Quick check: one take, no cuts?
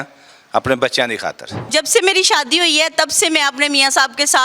no; 1 cut; at 1.7 s

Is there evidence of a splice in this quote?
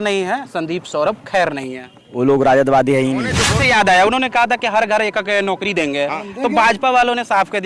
yes; 1 cut; at 3.5 s

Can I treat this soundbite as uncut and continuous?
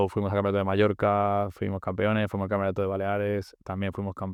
yes; 0 cuts

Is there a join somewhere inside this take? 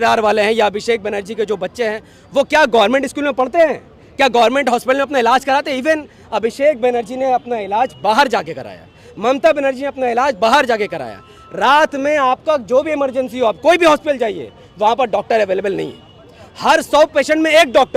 no; 0 cuts

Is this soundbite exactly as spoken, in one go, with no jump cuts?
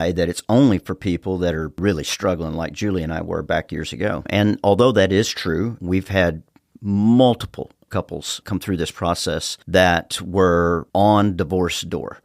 no; 3 cuts; at 1.8 s, 7.8 s, 9.5 s

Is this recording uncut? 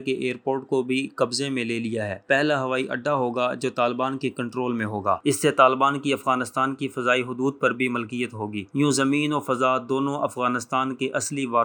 yes; 0 cuts

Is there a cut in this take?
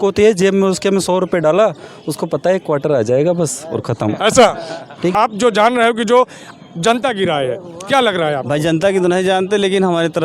yes; 1 cut; at 5.1 s

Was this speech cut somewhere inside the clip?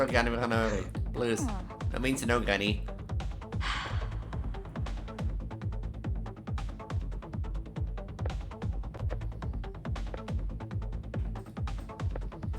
no; 0 cuts

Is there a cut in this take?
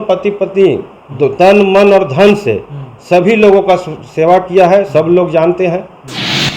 no; 0 cuts

